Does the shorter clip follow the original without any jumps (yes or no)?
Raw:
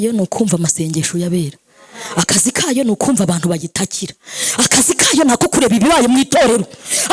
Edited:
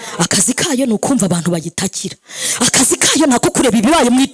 yes